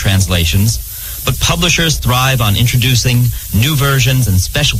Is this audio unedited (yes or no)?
yes